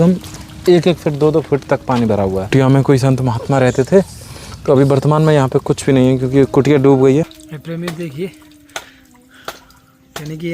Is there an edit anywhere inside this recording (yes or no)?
yes